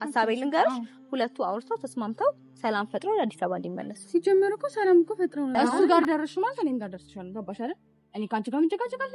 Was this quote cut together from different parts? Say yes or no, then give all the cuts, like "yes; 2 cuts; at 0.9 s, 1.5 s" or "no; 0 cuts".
yes; 1 cut; at 5.6 s